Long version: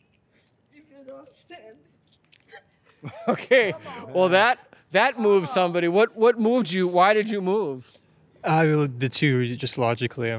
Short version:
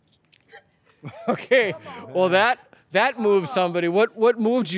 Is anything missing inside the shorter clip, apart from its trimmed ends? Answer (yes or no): no